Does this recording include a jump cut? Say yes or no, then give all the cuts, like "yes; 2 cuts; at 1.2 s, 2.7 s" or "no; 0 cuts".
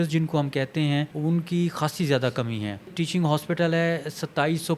yes; 2 cuts; at 1.1 s, 2.9 s